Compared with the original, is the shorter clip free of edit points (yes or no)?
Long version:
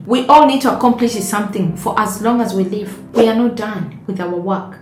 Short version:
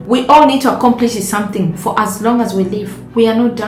yes